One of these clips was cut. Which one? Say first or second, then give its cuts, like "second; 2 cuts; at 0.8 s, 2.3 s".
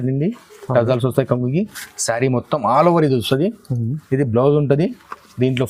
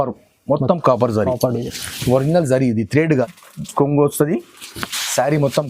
second; 1 cut; at 3.3 s